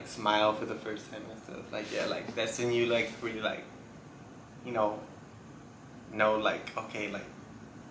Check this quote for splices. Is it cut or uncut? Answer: uncut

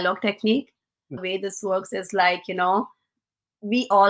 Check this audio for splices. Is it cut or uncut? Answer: cut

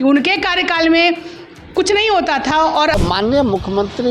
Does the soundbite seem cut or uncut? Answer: cut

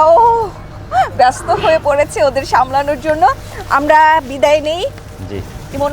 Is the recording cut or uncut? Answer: uncut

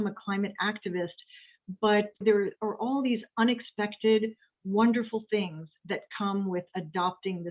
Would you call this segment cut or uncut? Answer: cut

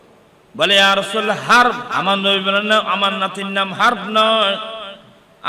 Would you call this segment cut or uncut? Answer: cut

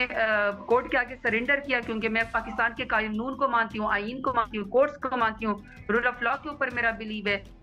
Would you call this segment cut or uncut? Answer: uncut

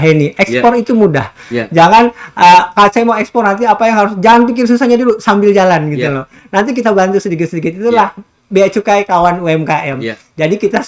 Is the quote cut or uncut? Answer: uncut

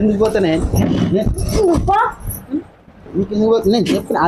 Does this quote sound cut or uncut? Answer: uncut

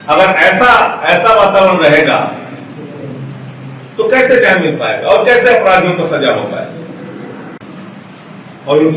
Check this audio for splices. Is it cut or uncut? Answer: cut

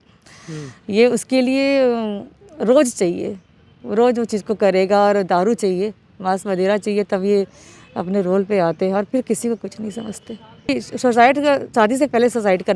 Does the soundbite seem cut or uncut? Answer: cut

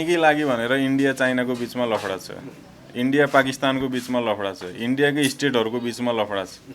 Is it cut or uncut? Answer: uncut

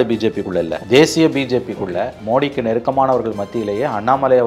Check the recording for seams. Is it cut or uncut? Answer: cut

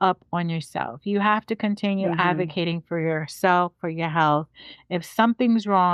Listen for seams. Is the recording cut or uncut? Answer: uncut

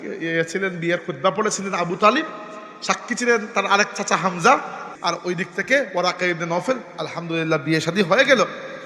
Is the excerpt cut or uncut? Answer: cut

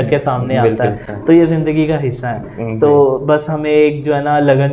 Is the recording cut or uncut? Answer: uncut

